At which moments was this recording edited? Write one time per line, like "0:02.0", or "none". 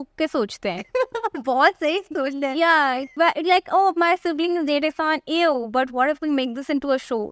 0:03.1